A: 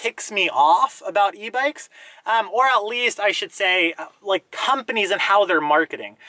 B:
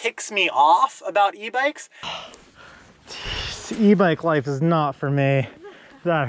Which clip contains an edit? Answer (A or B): B